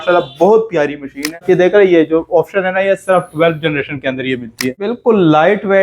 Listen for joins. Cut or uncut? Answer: cut